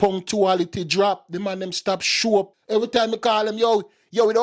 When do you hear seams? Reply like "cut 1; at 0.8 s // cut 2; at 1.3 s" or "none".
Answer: cut 1; at 2.5 s